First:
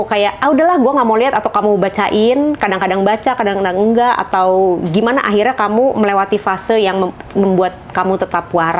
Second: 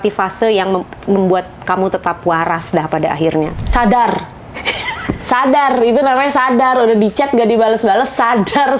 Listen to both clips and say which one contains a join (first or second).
second